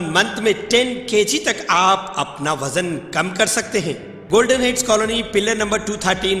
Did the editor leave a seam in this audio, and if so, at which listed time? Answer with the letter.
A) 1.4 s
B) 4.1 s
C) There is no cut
B